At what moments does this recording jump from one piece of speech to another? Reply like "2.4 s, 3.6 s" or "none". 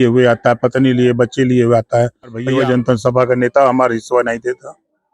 2.4 s